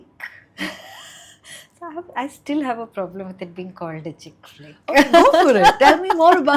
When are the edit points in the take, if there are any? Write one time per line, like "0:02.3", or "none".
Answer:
none